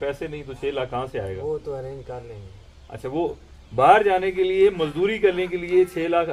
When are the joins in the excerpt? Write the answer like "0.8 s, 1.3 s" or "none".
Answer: none